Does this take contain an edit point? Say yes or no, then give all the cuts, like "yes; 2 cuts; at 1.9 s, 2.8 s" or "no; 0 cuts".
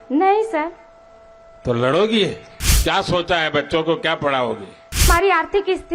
yes; 2 cuts; at 2.5 s, 5.1 s